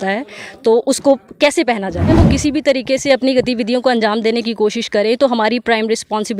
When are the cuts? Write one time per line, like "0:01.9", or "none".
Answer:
0:02.1